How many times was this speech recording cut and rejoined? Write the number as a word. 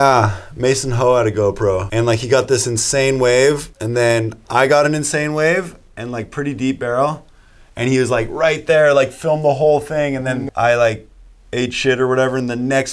three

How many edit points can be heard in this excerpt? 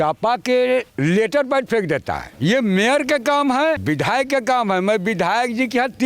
three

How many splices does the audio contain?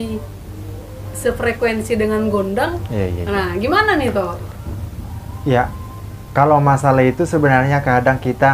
zero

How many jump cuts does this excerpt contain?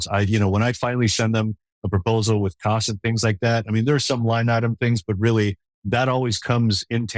one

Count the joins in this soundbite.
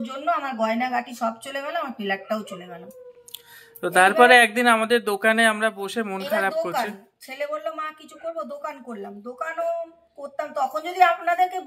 zero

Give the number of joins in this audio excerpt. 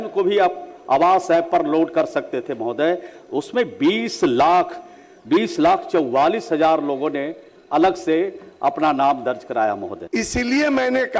one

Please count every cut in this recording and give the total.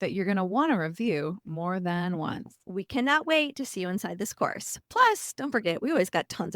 one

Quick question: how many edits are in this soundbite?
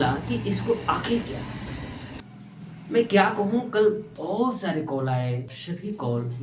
two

